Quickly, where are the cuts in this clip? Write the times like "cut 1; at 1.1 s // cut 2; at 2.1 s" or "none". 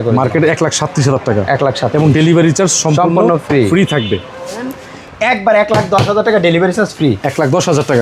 cut 1; at 4.8 s